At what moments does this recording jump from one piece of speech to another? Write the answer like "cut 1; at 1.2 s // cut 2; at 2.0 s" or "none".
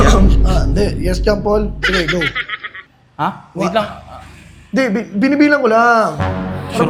none